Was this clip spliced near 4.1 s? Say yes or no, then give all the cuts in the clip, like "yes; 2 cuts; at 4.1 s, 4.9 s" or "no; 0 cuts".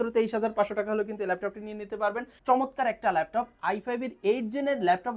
no; 1 cut; at 2.3 s